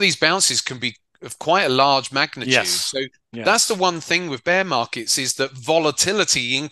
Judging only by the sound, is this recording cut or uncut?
uncut